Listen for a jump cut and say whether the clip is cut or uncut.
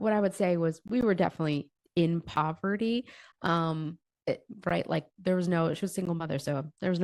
uncut